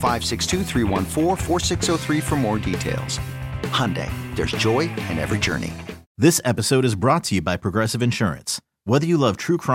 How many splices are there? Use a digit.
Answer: 0